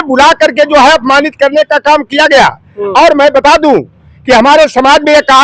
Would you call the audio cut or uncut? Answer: uncut